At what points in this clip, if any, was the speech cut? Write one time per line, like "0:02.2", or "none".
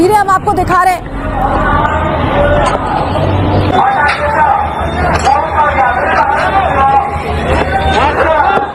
none